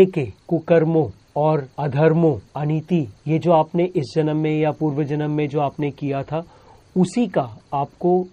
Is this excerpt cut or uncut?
uncut